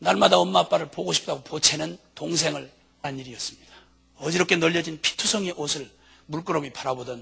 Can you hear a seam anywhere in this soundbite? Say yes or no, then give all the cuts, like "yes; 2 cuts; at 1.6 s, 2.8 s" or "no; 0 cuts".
no; 0 cuts